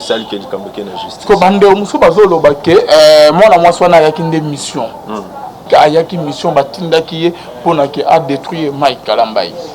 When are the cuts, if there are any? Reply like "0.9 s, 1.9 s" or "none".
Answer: 5.6 s